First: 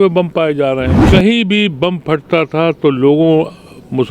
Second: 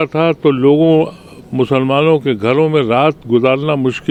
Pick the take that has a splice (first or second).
first